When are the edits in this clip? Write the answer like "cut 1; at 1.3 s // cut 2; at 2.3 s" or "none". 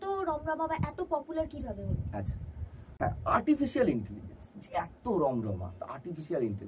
cut 1; at 2.9 s